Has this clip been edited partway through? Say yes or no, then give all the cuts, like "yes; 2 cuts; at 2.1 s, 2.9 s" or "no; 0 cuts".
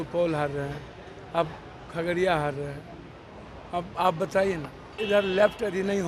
yes; 1 cut; at 4.9 s